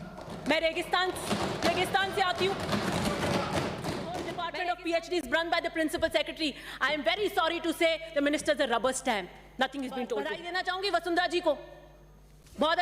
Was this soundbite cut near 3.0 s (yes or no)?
no